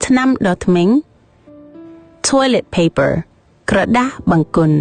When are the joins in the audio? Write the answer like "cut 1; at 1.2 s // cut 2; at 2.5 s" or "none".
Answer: cut 1; at 0.9 s